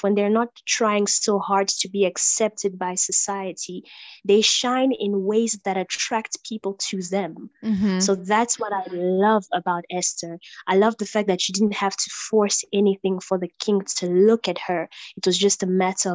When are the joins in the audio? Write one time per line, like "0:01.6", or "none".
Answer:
none